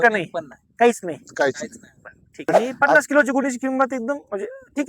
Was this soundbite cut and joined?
yes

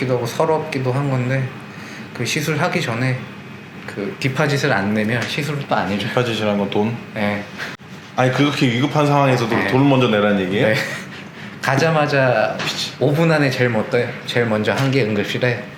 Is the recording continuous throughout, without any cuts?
yes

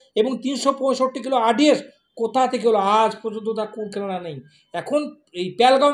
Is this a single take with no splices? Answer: yes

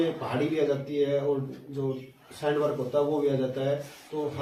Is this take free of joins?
yes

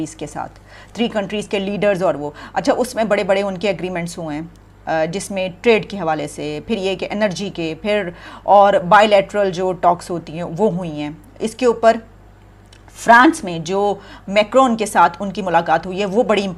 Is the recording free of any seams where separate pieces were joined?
yes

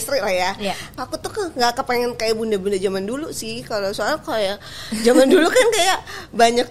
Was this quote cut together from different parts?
yes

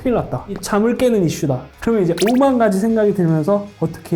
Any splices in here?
yes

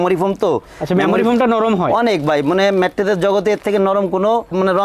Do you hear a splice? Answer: no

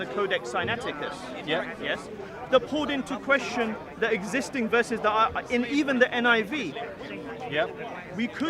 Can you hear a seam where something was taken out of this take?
no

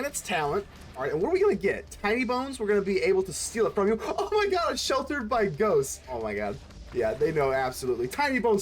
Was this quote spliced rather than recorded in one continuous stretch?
yes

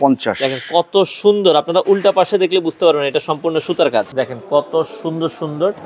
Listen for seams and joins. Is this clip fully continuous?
no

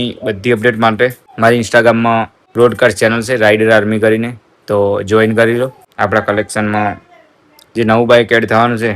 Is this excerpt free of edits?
no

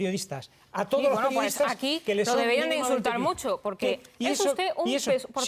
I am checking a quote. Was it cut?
no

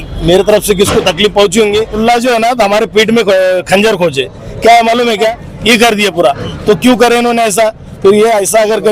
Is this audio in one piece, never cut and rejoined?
no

